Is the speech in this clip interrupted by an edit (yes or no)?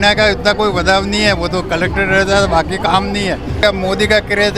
yes